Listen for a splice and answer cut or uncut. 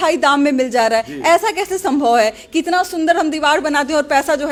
uncut